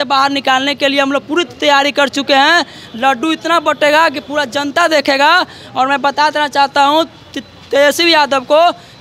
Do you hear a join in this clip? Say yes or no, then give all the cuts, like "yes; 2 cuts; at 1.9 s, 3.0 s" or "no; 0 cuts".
no; 0 cuts